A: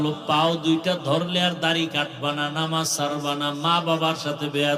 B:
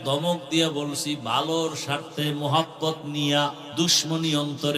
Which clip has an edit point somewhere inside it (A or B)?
B